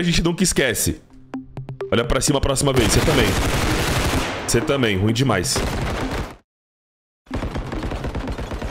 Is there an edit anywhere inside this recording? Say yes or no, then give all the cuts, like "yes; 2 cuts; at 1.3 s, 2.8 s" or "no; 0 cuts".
no; 0 cuts